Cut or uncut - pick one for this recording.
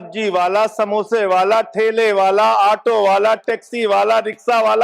uncut